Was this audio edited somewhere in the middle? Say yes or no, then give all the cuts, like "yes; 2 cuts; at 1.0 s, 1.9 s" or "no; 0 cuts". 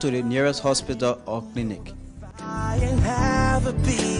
no; 0 cuts